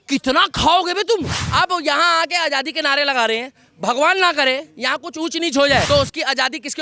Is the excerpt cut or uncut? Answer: cut